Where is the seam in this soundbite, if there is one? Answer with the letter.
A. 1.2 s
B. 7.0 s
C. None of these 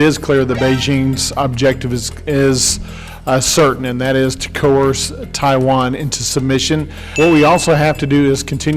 B